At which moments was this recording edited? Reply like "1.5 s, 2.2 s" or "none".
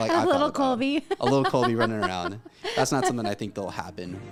none